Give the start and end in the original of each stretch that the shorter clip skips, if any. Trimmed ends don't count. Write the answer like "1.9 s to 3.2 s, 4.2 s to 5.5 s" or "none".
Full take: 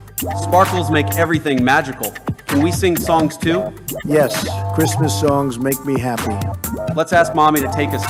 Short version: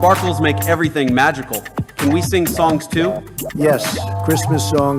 none